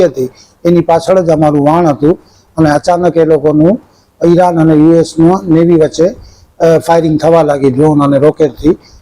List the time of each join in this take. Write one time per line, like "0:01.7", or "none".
none